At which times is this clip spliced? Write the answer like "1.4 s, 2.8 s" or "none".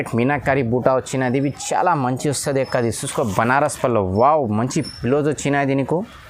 none